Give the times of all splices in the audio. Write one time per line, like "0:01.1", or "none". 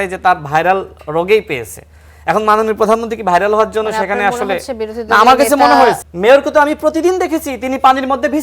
0:06.0

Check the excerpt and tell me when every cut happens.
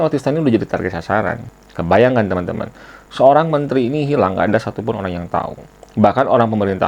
0:01.5

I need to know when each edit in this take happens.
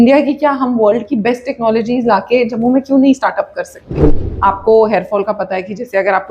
0:04.3

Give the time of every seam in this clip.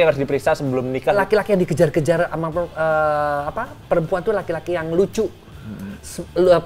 0:01.2

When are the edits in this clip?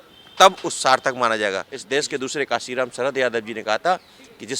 0:01.7

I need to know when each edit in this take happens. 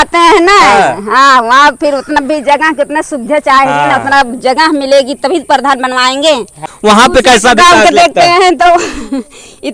0:06.7

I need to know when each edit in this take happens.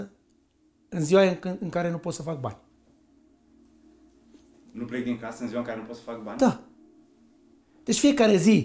0:03.1
0:04.7

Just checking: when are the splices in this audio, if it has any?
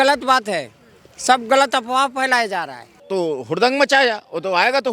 0:03.0

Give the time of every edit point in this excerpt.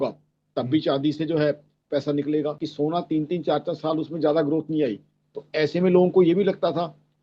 0:02.6

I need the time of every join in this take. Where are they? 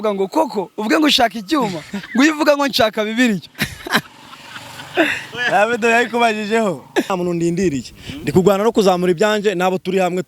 0:07.1

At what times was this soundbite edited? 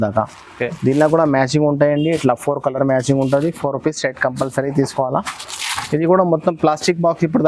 none

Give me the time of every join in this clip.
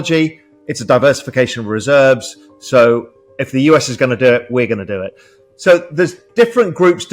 0:06.2

